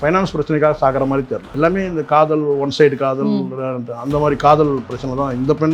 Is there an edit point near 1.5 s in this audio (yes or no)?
yes